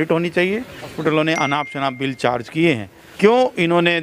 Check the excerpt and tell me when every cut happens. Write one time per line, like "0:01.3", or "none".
0:01.0
0:03.0